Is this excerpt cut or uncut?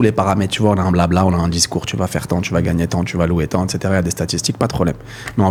uncut